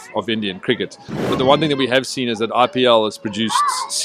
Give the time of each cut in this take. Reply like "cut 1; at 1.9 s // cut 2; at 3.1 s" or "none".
cut 1; at 1.2 s